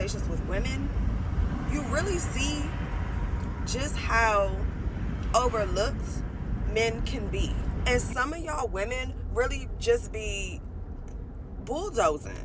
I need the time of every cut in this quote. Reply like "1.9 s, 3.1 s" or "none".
7.7 s